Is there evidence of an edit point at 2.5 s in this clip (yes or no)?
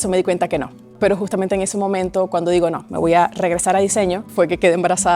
no